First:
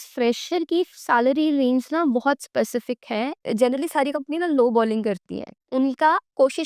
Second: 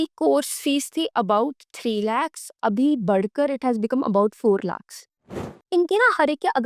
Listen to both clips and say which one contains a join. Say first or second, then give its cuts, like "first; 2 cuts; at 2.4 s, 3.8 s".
second; 1 cut; at 5.3 s